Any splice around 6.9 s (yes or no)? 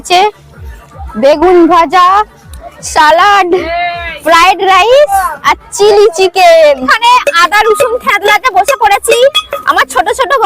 yes